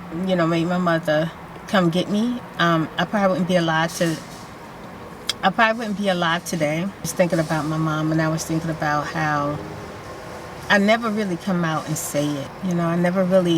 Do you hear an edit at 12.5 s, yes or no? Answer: yes